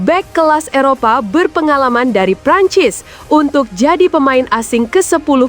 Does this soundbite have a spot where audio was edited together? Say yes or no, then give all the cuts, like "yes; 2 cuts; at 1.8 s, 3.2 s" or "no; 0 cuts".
no; 0 cuts